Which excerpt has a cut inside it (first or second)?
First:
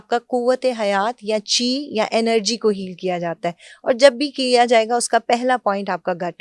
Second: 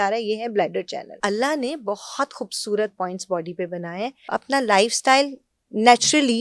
second